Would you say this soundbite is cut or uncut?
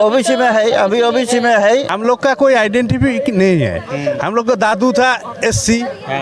cut